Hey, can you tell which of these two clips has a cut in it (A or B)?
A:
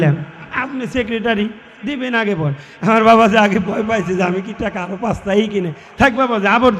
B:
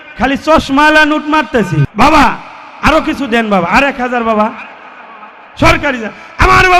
B